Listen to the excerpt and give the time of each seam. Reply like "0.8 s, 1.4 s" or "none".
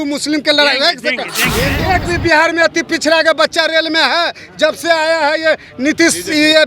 1.7 s